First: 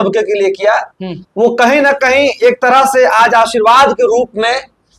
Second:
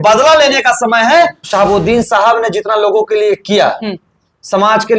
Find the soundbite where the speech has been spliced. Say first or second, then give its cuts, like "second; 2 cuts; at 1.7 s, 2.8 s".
second; 1 cut; at 1.4 s